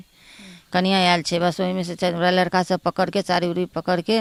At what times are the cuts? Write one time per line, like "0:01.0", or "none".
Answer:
none